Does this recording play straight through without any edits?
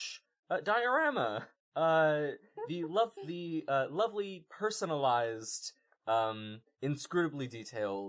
yes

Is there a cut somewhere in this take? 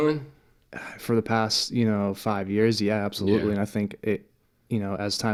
no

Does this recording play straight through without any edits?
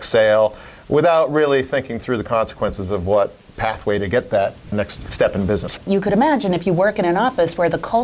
no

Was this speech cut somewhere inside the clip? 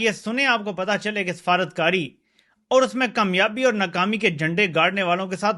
no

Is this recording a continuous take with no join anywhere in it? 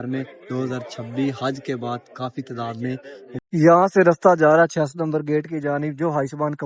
no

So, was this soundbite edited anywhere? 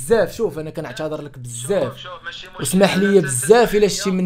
no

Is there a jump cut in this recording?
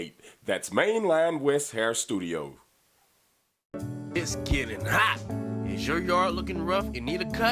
yes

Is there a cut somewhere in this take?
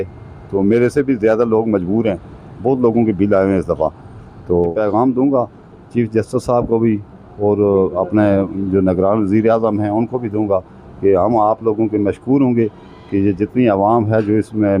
yes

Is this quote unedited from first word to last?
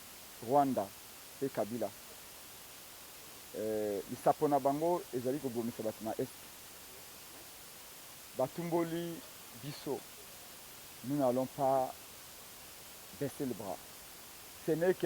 no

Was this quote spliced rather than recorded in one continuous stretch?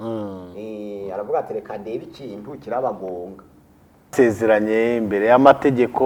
yes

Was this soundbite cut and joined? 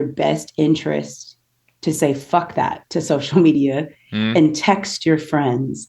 no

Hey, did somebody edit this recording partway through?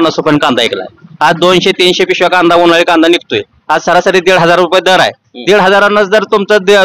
no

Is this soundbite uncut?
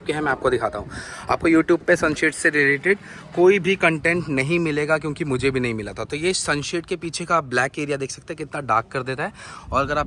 yes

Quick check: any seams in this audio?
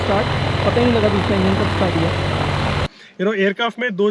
yes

